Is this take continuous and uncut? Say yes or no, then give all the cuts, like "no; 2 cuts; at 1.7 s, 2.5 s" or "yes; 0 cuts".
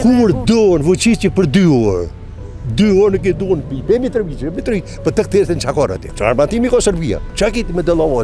no; 2 cuts; at 6.0 s, 7.3 s